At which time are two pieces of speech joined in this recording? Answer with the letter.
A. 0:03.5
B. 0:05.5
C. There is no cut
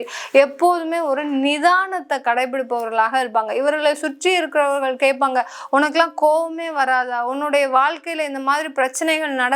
C